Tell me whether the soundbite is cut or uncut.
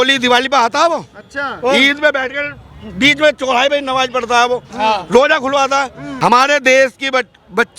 cut